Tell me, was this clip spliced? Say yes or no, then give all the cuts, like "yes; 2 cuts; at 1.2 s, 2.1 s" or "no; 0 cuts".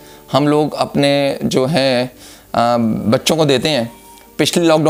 no; 0 cuts